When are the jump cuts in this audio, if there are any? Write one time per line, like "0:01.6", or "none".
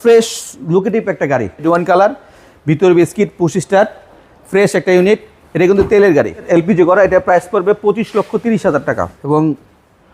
0:01.6
0:06.5
0:09.1